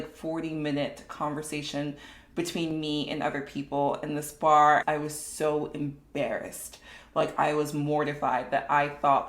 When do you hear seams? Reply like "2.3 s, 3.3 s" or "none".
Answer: 4.8 s